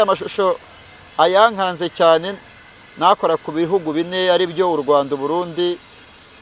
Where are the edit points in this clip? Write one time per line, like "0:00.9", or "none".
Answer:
none